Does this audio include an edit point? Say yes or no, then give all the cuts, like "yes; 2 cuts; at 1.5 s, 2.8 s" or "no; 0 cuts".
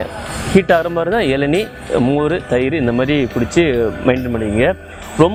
no; 0 cuts